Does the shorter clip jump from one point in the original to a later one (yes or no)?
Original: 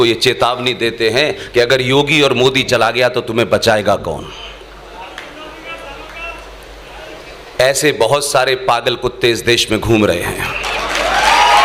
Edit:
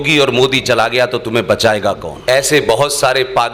yes